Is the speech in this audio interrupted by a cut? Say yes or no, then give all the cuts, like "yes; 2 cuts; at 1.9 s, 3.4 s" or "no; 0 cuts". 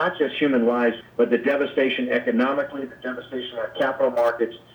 yes; 1 cut; at 1.0 s